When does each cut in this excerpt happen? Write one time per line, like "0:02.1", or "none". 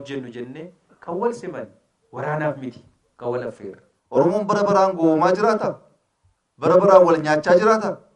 0:03.9